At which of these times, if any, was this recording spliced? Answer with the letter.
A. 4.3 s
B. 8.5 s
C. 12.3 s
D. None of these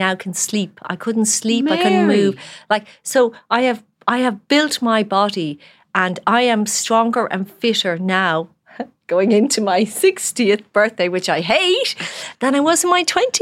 C